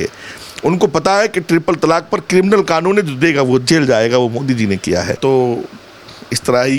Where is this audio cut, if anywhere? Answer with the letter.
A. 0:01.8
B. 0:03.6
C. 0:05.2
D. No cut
C